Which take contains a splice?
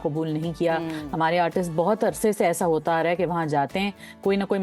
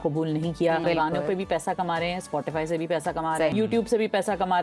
second; 2 cuts; at 0.8 s, 3.5 s

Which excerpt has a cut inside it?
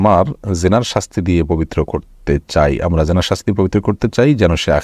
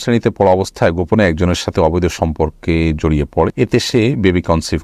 second; 1 cut; at 3.5 s

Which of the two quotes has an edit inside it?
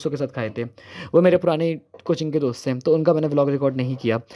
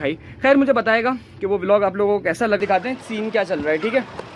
second; 1 cut; at 2.6 s

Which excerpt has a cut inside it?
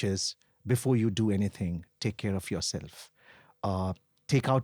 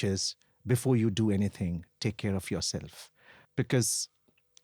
second; 1 cut; at 3.4 s

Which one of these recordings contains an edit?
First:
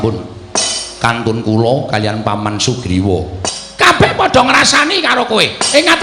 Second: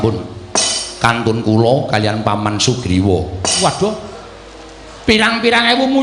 first; 1 cut; at 3.4 s

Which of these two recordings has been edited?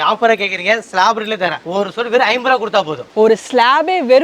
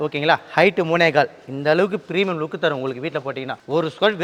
first; 2 cuts; at 1.6 s, 3.0 s

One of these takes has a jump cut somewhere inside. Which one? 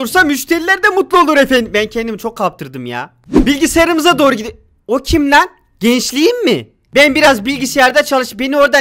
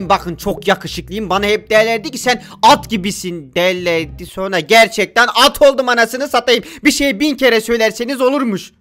first; 1 cut; at 3.3 s

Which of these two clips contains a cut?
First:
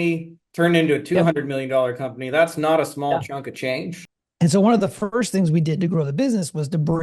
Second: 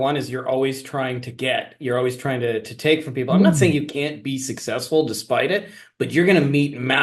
first; 1 cut; at 4.1 s

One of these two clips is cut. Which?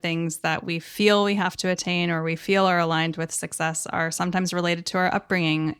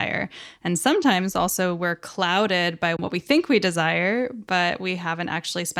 second; 1 cut; at 3.0 s

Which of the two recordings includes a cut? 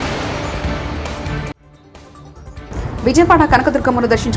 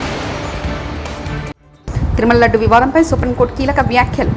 first; 1 cut; at 1.7 s

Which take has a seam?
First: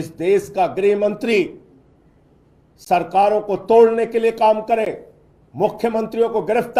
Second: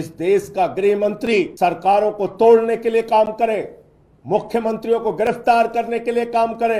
second; 1 cut; at 1.5 s

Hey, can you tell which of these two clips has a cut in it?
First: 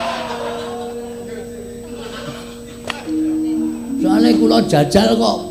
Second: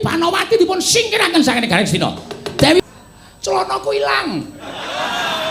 second; 1 cut; at 2.8 s

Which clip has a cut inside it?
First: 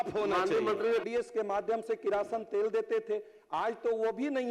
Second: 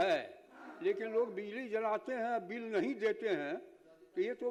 first; 1 cut; at 1.1 s

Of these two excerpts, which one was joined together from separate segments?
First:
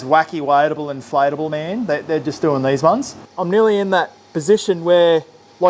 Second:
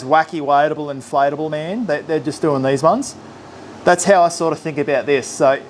first; 1 cut; at 3.3 s

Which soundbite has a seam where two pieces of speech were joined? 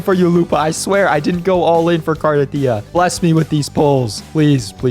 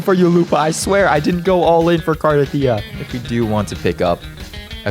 second; 1 cut; at 2.9 s

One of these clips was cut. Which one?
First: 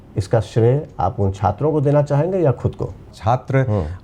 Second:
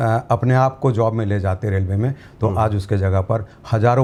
first; 1 cut; at 3.1 s

